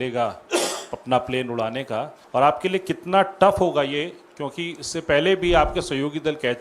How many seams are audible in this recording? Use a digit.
1